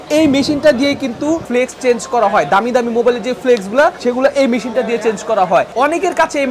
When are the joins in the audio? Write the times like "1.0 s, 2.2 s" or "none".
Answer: 1.4 s